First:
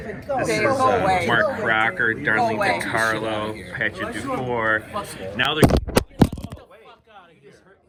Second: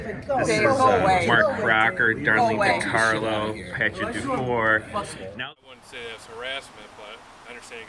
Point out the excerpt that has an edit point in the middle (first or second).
second